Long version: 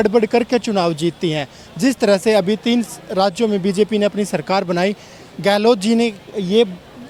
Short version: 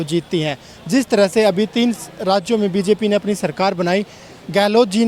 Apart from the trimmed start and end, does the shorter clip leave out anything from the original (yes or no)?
no